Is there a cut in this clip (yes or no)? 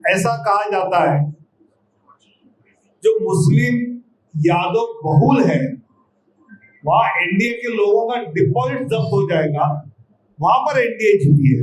no